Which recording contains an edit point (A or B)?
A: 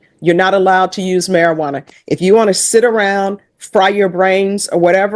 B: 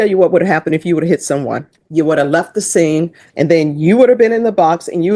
B